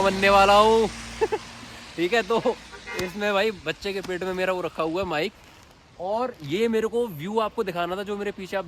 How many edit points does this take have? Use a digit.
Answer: 0